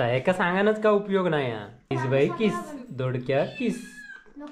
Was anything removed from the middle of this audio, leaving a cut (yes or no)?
yes